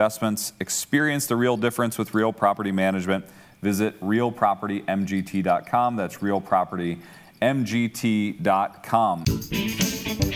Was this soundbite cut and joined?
yes; 1 cut; at 9.2 s

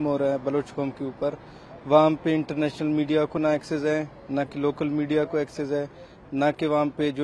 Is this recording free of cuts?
yes; 0 cuts

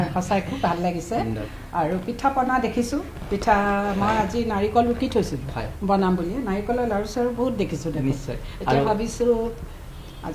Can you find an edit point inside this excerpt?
no; 0 cuts

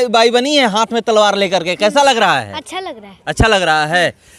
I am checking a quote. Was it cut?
no; 0 cuts

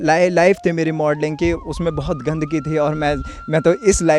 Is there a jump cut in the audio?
no; 0 cuts

